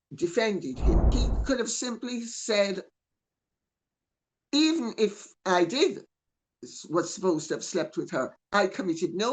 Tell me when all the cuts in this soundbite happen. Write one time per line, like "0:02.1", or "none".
0:01.1